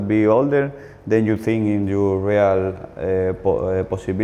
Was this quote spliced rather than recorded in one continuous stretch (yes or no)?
no